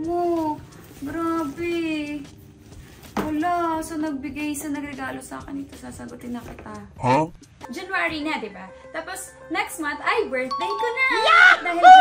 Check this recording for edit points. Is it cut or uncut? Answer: cut